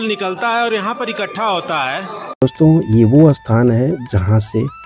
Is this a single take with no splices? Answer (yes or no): no